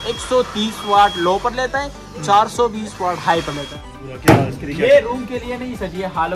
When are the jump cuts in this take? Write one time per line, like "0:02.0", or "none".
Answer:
0:03.9